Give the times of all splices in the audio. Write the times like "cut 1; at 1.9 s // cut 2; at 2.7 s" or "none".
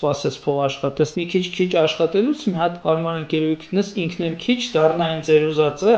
cut 1; at 1.2 s // cut 2; at 2.8 s